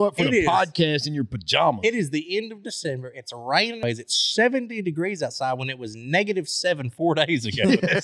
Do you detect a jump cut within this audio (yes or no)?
yes